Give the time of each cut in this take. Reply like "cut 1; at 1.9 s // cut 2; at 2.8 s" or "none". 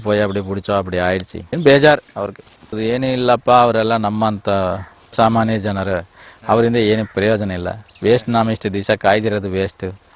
none